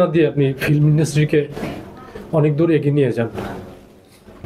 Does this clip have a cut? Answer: no; 0 cuts

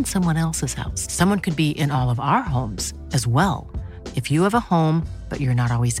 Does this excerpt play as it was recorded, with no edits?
yes; 0 cuts

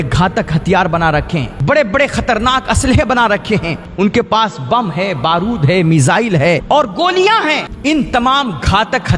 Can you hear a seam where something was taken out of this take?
yes; 4 cuts; at 1.5 s, 3.8 s, 6.6 s, 7.7 s

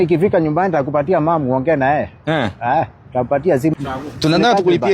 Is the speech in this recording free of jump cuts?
no; 1 cut; at 3.7 s

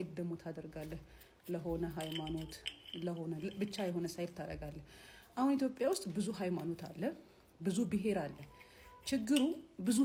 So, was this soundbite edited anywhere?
no; 0 cuts

